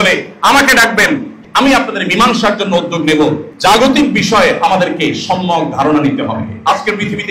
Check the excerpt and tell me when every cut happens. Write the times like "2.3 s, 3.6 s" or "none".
1.4 s, 3.4 s